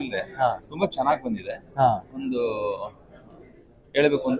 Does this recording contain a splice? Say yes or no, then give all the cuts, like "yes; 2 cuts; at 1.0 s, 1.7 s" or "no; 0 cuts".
no; 0 cuts